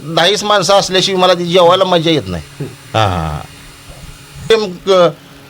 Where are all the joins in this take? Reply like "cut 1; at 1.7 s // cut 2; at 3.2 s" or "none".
cut 1; at 4.5 s